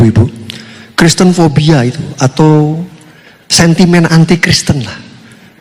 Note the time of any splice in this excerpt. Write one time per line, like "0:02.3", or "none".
none